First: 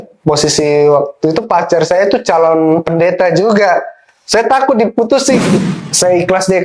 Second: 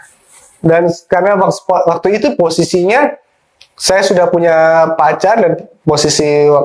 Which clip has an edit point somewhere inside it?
first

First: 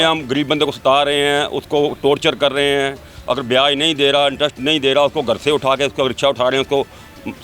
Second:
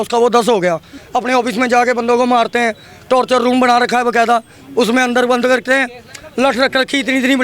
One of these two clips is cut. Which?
second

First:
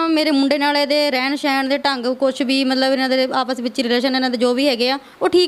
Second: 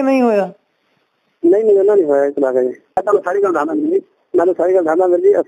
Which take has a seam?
second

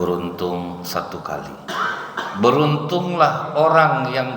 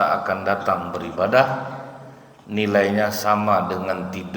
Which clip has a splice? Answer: first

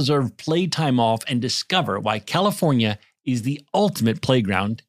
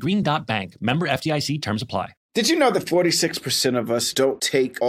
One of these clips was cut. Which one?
second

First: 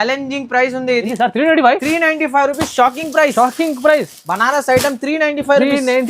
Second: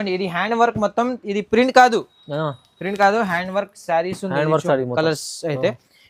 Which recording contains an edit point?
first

